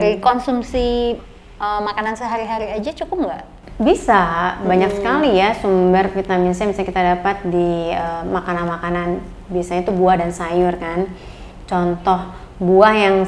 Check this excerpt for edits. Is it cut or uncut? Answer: uncut